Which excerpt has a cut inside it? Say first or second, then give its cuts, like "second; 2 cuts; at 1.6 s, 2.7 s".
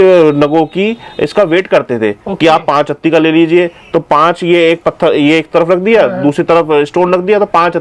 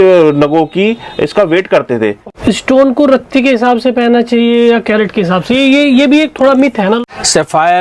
second; 2 cuts; at 2.2 s, 7.0 s